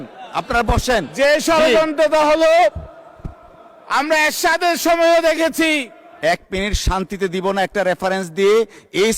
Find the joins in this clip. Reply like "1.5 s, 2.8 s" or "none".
6.0 s